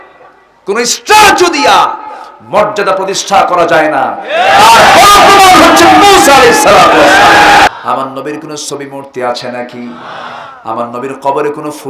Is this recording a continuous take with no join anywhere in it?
no; 1 cut; at 7.7 s

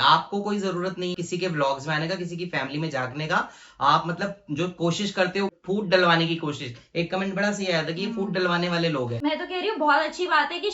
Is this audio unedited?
no; 3 cuts; at 1.1 s, 5.5 s, 9.2 s

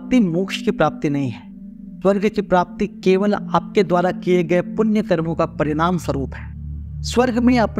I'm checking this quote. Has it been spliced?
no; 0 cuts

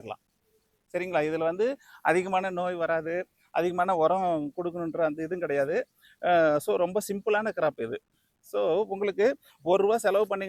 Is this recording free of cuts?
yes; 0 cuts

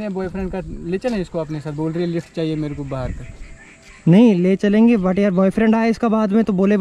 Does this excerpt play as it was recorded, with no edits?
yes; 0 cuts

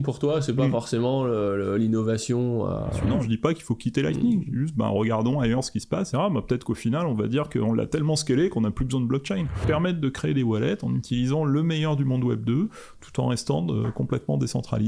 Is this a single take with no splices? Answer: no; 3 cuts; at 3.0 s, 6.1 s, 9.5 s

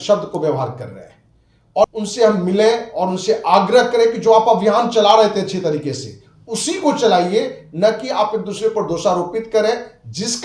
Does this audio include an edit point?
yes; 1 cut; at 1.8 s

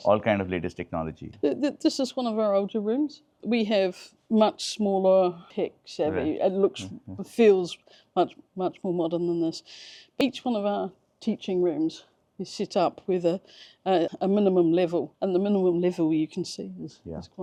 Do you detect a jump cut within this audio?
no; 0 cuts

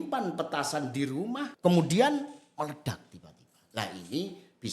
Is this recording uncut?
no; 1 cut; at 1.5 s

